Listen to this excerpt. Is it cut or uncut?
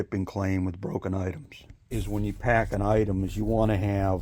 cut